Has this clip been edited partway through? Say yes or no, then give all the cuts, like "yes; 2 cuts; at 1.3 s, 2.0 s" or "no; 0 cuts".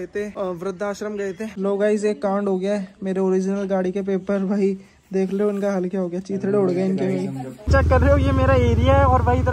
yes; 2 cuts; at 1.5 s, 7.7 s